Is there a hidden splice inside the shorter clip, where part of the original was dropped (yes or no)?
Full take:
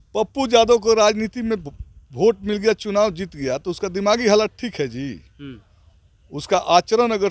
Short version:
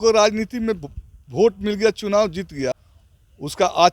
yes